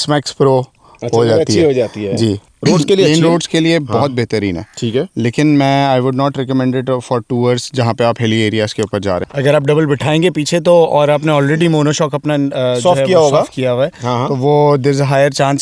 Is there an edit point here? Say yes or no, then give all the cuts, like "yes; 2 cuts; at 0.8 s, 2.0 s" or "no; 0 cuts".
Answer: yes; 2 cuts; at 2.5 s, 9.3 s